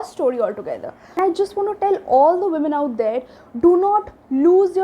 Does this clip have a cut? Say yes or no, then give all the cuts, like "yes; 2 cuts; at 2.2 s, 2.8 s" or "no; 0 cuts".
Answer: yes; 1 cut; at 1.2 s